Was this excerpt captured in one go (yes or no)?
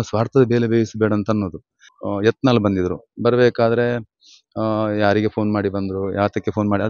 no